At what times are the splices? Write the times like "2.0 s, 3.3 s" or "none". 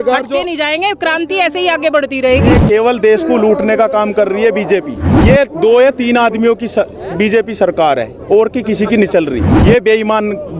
2.5 s, 5.1 s, 9.5 s